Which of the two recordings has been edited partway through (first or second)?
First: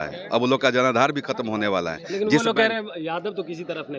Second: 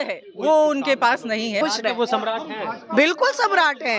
second